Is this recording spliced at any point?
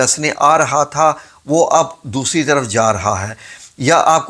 no; 0 cuts

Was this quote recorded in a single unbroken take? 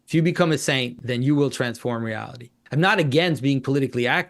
no; 2 cuts; at 1.0 s, 2.6 s

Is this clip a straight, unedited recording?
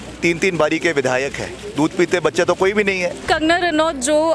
no; 1 cut; at 3.2 s

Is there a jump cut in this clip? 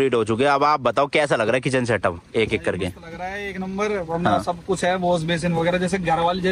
no; 0 cuts

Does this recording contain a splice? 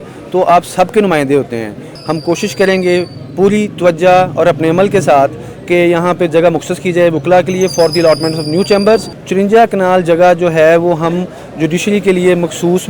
yes; 2 cuts; at 1.9 s, 9.2 s

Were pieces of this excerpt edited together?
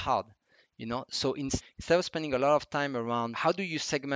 yes; 2 cuts; at 1.6 s, 3.3 s

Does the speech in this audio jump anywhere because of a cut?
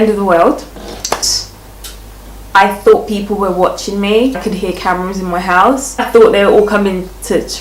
yes; 3 cuts; at 1.2 s, 4.4 s, 6.0 s

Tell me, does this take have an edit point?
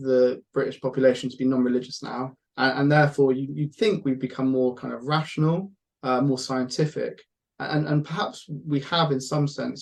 no; 0 cuts

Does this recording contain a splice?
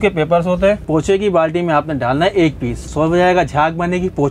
yes; 2 cuts; at 0.8 s, 2.9 s

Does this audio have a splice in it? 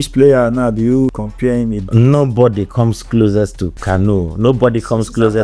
yes; 2 cuts; at 1.2 s, 3.7 s

